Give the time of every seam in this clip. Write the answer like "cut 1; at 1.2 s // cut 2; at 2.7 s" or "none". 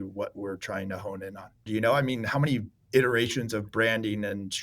cut 1; at 1.6 s